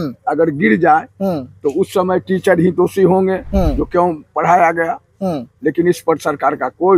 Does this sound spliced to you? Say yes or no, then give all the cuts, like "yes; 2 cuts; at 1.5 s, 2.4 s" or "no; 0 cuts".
no; 0 cuts